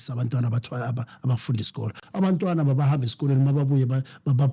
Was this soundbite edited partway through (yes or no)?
no